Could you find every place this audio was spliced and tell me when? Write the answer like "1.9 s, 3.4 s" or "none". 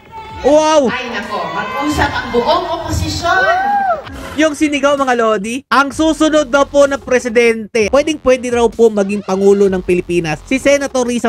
4.1 s, 7.9 s